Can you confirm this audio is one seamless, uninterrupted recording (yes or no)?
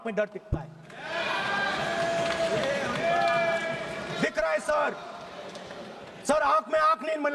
yes